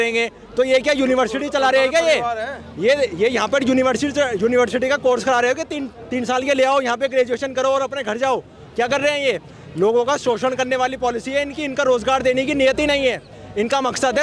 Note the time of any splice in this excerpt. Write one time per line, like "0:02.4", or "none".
none